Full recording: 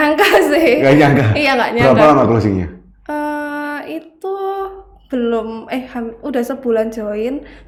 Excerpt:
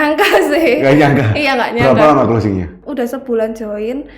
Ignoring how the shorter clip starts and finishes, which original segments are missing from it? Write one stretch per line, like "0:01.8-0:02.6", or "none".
0:02.8-0:06.2